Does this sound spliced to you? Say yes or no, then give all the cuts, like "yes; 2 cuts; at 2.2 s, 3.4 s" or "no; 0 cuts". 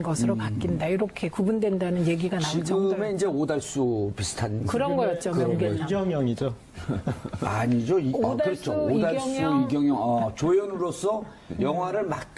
yes; 1 cut; at 3.8 s